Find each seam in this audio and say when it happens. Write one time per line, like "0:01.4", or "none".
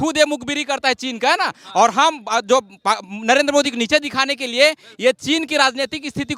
none